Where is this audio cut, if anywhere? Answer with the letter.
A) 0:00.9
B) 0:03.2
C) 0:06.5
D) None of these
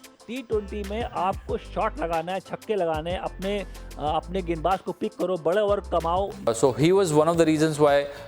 C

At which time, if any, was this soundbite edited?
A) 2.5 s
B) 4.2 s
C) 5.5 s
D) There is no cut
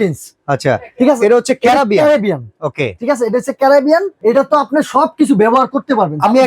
D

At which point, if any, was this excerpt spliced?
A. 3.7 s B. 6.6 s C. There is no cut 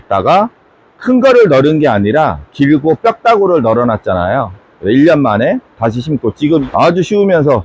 B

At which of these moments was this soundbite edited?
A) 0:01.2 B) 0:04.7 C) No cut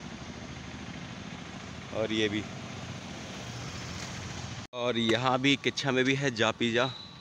B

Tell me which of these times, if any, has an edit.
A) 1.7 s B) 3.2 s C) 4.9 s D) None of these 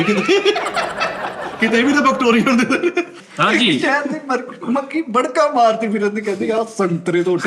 B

